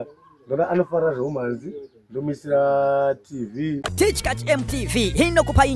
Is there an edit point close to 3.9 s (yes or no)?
yes